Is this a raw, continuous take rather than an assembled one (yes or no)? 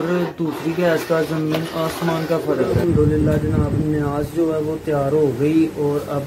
no